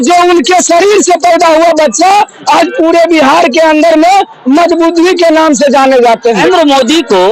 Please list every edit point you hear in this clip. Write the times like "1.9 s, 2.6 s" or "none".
6.4 s

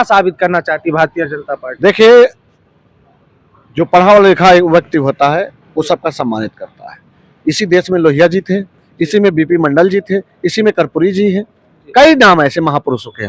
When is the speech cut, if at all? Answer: none

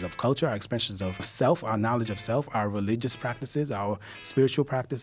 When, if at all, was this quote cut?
1.3 s

